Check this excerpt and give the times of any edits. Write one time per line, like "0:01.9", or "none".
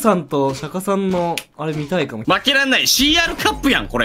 0:02.2